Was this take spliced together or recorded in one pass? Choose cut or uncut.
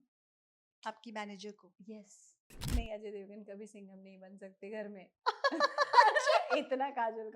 cut